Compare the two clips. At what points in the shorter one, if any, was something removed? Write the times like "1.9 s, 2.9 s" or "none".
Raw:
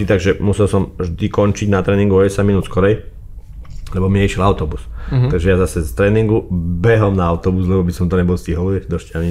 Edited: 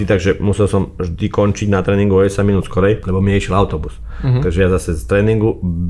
3.0 s

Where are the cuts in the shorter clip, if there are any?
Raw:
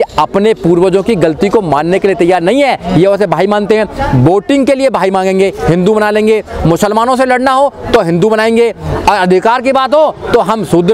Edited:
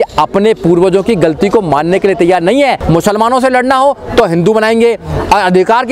2.8 s

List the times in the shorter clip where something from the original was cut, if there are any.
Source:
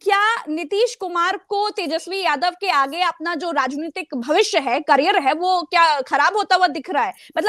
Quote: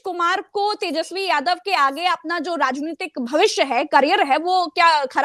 none

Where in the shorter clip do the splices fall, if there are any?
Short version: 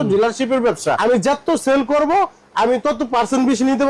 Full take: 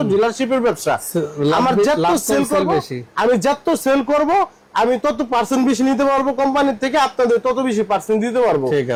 1.0 s

